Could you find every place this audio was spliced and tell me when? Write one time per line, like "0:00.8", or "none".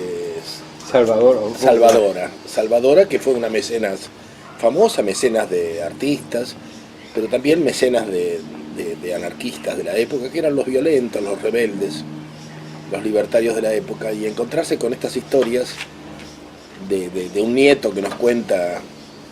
0:10.5